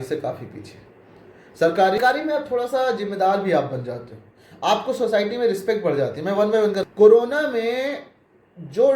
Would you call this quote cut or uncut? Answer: cut